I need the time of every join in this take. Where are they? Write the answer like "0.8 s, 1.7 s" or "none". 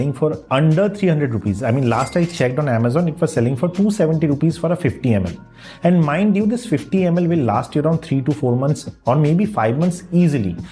none